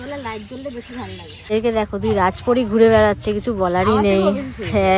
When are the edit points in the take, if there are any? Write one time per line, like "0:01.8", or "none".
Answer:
0:01.4